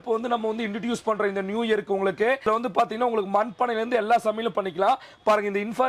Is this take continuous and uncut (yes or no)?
yes